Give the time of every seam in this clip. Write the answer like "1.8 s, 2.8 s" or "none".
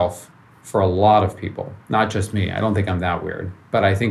none